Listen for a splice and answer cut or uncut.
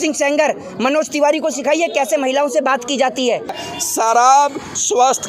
cut